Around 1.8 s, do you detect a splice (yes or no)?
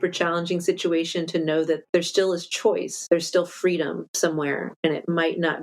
yes